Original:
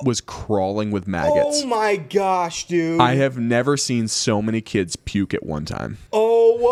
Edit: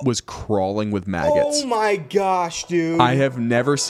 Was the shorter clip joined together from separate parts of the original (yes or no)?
no